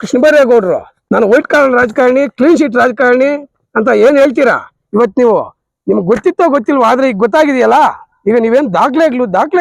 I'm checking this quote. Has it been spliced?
yes; 1 cut; at 0.9 s

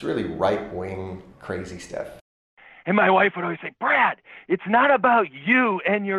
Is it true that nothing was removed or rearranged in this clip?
no; 1 cut; at 2.3 s

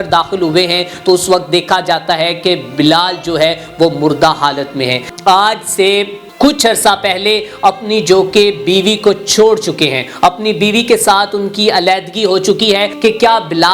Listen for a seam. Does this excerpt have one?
yes; 3 cuts; at 5.1 s, 6.2 s, 12.9 s

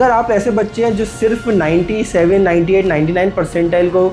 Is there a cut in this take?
no; 0 cuts

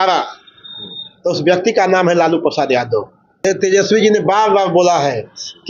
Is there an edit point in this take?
yes; 1 cut; at 3.4 s

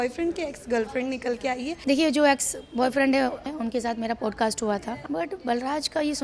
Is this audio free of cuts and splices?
no; 3 cuts; at 1.8 s, 3.5 s, 4.9 s

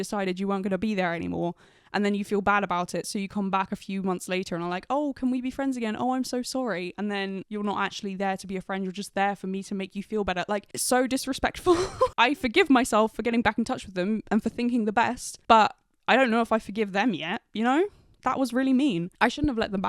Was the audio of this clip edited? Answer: no; 0 cuts

